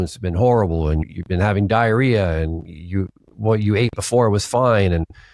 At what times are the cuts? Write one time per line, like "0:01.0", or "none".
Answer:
none